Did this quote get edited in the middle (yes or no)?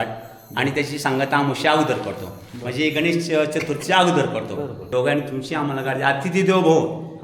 yes